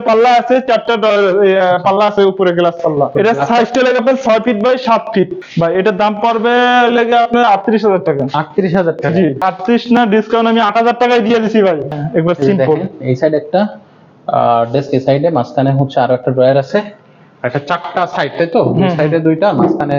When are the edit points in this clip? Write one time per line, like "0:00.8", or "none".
0:03.1
0:05.4
0:09.4
0:11.9